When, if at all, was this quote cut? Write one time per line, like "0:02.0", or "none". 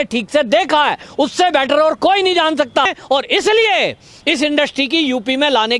0:02.8